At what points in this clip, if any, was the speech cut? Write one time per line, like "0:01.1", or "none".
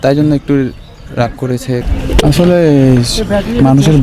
0:01.8